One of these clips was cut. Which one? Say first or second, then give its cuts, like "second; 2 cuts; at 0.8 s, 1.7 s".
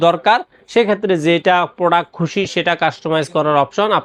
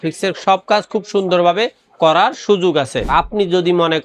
second; 1 cut; at 3.1 s